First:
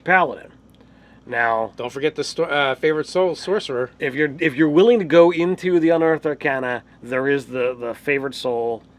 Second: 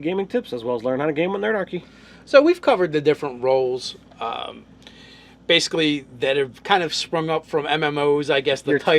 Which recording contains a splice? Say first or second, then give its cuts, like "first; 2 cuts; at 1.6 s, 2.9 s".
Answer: second; 1 cut; at 5.9 s